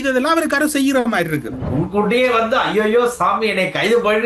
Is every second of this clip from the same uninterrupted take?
no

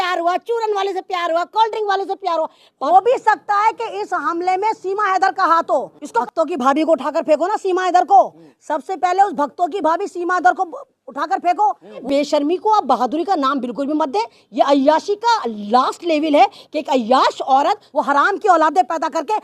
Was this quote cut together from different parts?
yes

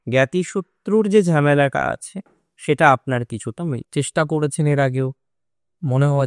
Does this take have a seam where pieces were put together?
yes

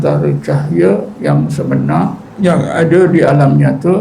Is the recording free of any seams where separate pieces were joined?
no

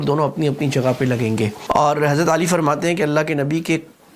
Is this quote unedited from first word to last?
no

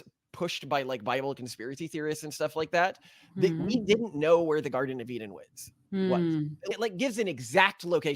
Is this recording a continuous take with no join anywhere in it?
no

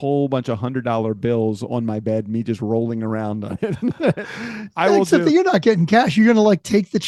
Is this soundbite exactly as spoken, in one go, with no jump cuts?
yes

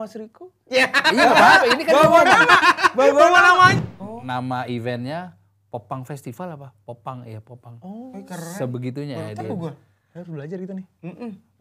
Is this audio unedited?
no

